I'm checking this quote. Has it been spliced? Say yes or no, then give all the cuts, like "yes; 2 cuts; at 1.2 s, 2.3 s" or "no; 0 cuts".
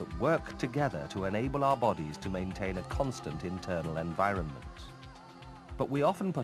no; 0 cuts